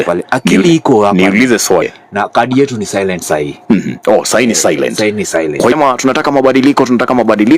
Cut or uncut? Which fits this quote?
cut